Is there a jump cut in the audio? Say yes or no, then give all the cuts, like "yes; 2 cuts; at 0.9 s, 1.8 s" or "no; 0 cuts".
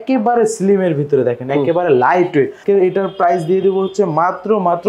yes; 1 cut; at 2.6 s